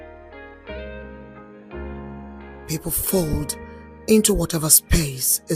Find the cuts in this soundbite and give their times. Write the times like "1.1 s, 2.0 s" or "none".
2.6 s